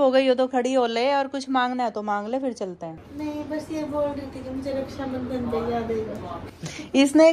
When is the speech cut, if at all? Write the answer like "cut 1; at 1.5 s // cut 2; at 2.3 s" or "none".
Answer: none